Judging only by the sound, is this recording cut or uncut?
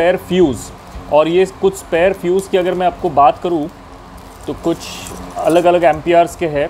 uncut